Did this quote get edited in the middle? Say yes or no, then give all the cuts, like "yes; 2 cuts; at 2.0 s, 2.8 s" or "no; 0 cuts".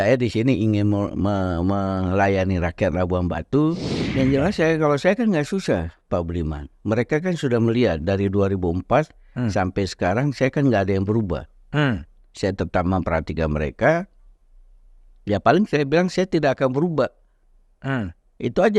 yes; 1 cut; at 4.0 s